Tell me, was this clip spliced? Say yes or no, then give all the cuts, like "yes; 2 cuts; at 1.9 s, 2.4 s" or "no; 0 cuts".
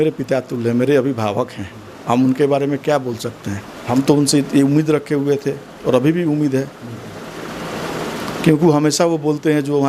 yes; 1 cut; at 3.8 s